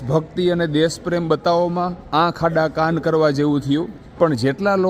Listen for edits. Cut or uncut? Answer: cut